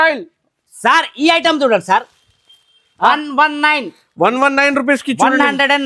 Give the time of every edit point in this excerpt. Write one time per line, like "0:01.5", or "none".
0:03.1